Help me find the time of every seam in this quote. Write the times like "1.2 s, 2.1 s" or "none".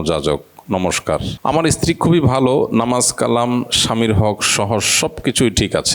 1.3 s